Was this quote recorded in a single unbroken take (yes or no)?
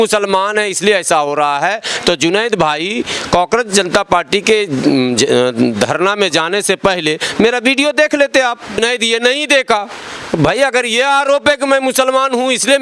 no